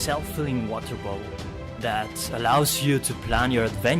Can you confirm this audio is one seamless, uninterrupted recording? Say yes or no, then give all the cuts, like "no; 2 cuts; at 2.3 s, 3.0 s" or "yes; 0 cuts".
no; 1 cut; at 1.6 s